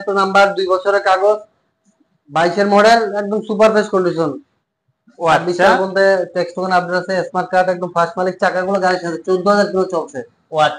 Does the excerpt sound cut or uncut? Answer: uncut